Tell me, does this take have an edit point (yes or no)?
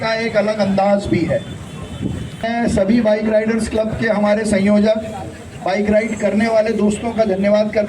yes